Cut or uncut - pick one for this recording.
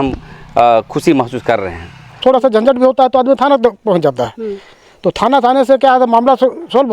cut